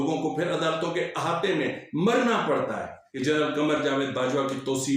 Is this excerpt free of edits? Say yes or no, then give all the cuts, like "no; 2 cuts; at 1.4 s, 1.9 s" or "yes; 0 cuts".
no; 1 cut; at 3.0 s